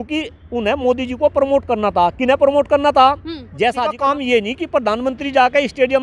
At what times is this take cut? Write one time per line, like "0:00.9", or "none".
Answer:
0:03.9